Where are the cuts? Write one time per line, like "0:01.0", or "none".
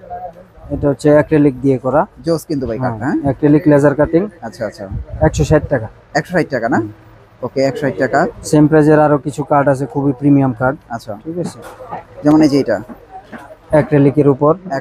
none